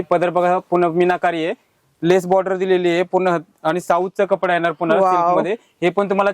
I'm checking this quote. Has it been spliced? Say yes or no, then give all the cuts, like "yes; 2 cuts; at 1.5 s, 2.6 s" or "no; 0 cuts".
yes; 1 cut; at 1.7 s